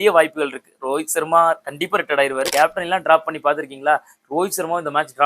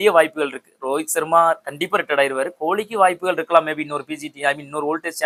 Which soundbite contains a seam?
first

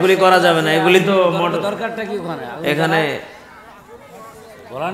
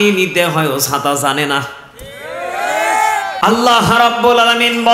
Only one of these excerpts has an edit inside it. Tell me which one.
second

